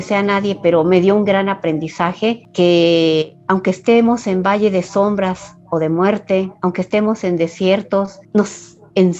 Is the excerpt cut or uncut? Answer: uncut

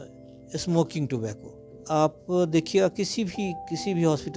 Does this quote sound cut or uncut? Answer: cut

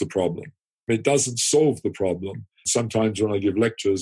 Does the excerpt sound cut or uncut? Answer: cut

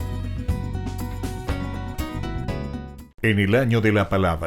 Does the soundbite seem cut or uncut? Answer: cut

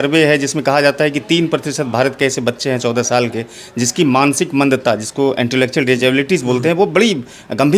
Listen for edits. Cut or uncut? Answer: uncut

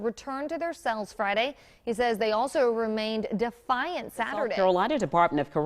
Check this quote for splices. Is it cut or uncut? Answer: cut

